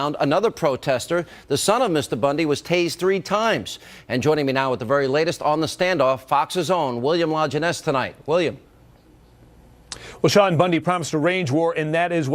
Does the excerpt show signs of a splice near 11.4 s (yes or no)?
no